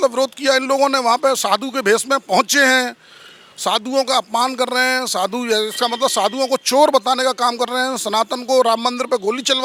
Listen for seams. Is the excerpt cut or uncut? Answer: uncut